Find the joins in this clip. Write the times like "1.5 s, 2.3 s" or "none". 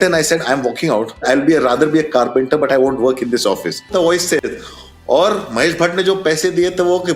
1.2 s, 3.9 s